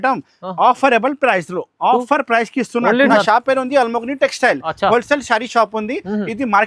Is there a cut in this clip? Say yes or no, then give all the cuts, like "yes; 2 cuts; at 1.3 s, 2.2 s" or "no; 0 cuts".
yes; 1 cut; at 3.1 s